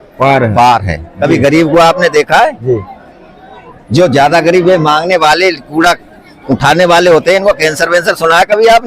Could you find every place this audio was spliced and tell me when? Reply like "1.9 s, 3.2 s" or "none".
1.1 s